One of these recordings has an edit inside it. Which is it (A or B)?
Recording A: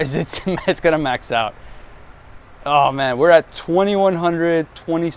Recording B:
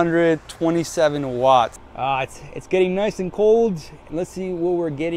B